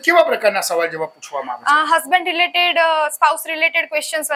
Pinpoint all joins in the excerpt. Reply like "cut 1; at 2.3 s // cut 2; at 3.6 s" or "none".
none